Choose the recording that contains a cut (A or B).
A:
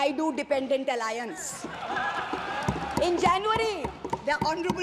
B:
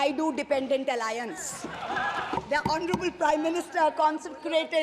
B